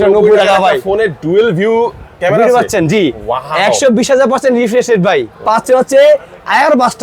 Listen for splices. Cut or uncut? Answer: cut